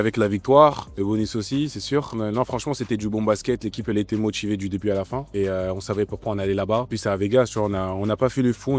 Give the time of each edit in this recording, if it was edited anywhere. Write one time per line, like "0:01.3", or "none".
0:00.9
0:02.1
0:05.2
0:06.9